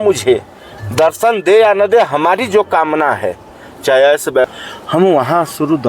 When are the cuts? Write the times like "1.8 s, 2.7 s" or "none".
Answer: 4.4 s